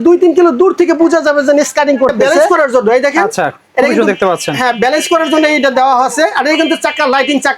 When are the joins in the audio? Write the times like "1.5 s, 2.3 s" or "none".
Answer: 2.5 s